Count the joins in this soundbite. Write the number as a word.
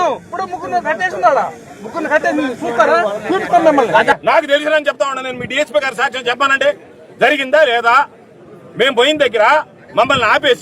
one